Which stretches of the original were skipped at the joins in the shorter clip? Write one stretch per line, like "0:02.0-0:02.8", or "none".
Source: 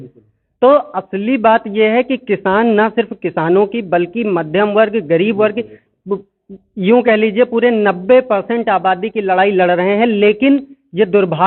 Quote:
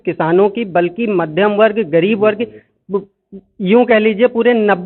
none